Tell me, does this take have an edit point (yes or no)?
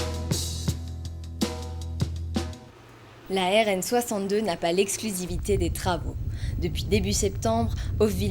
yes